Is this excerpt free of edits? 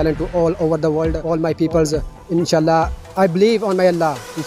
no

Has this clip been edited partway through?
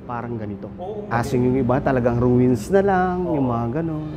yes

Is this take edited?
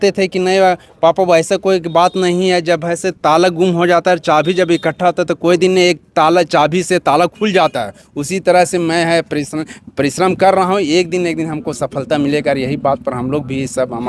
no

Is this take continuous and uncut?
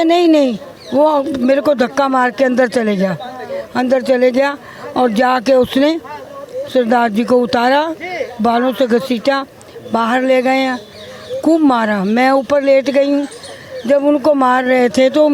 yes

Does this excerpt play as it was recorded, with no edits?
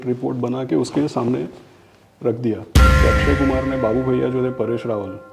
no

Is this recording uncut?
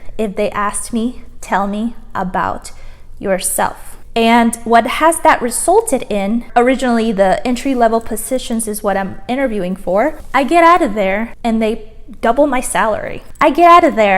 no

